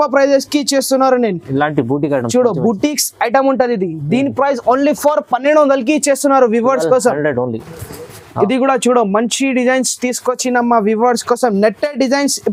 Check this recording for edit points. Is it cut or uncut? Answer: uncut